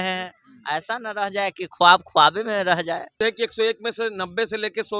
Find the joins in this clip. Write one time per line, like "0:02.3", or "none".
0:03.2